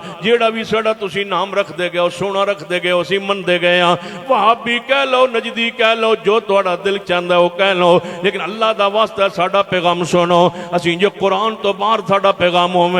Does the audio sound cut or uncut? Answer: uncut